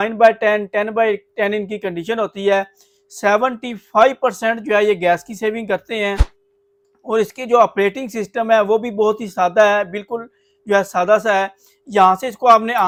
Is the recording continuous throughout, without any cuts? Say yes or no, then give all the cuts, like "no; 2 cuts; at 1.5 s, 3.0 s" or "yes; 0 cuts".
yes; 0 cuts